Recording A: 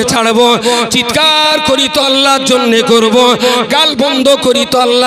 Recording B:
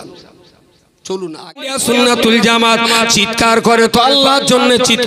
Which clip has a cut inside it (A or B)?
B